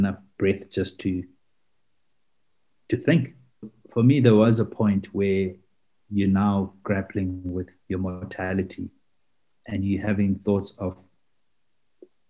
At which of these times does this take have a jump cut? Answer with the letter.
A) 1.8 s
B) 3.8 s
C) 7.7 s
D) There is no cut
B